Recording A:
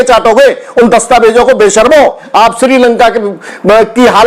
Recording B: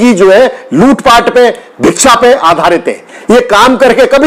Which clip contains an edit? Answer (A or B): A